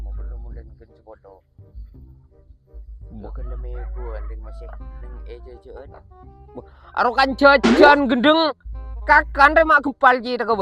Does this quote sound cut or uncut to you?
uncut